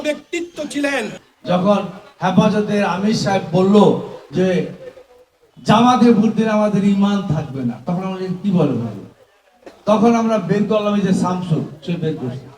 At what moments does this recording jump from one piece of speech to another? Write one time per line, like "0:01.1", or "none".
0:01.3